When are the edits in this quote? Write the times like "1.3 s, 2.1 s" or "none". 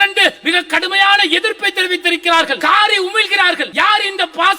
2.6 s, 3.7 s